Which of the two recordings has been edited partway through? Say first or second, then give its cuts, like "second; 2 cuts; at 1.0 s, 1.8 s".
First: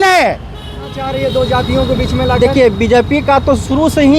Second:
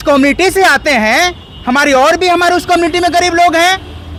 first; 1 cut; at 1.0 s